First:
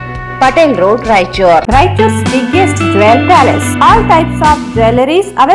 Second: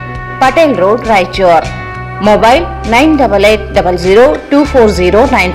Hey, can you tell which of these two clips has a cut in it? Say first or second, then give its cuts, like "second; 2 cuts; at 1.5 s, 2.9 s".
first; 1 cut; at 1.6 s